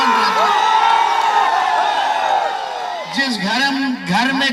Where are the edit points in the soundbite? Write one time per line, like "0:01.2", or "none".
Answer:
none